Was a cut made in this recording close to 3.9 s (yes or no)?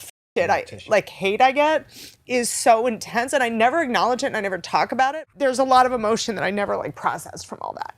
no